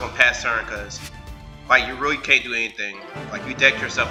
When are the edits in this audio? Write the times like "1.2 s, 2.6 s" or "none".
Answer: none